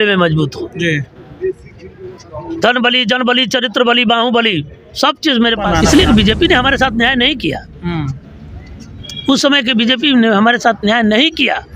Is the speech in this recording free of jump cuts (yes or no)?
no